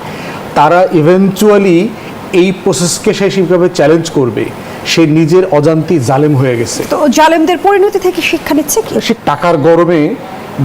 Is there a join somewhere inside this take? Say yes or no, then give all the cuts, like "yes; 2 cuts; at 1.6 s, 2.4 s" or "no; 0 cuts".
yes; 1 cut; at 9.2 s